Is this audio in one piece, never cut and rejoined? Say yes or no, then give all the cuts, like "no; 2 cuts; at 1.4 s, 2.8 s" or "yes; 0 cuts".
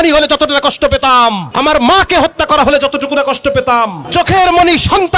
no; 2 cuts; at 1.4 s, 4.0 s